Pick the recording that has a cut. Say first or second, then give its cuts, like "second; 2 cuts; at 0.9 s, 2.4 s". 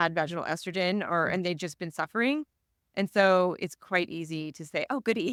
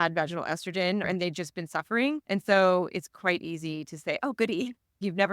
second; 2 cuts; at 1.0 s, 2.2 s